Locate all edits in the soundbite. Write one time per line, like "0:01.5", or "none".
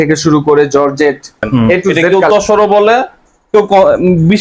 0:02.0